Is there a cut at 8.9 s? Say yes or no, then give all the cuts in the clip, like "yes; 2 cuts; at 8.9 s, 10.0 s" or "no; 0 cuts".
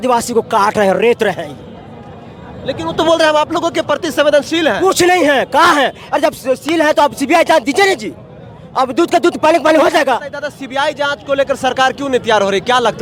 no; 0 cuts